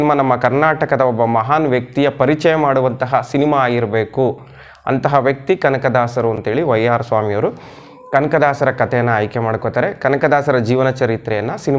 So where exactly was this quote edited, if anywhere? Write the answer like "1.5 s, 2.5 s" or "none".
none